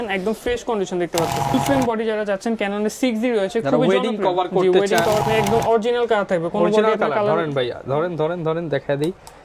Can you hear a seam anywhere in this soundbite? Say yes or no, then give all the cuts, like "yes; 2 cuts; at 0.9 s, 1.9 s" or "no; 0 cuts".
yes; 2 cuts; at 1.5 s, 5.2 s